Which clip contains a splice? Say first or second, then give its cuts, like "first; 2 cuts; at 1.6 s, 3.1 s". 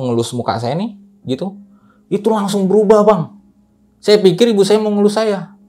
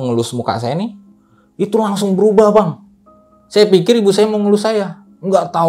second; 1 cut; at 1.1 s